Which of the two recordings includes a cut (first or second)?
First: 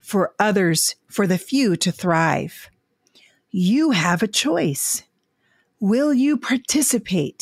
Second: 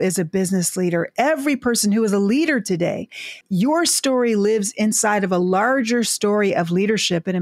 second